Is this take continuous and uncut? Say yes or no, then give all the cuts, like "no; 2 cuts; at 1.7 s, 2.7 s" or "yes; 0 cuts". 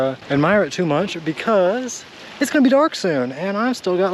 yes; 0 cuts